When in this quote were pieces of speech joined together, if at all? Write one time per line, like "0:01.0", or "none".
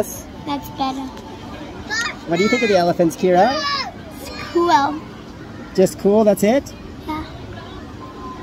none